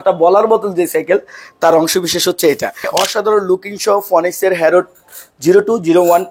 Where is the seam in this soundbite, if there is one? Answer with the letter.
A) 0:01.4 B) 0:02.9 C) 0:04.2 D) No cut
B